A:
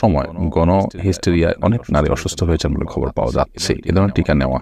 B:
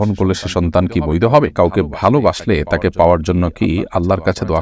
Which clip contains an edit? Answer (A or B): B